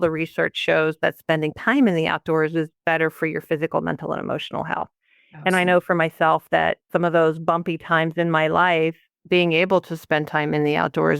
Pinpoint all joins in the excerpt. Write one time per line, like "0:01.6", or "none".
0:06.9